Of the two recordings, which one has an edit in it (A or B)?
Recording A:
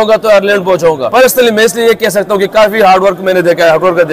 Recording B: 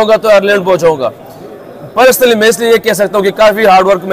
A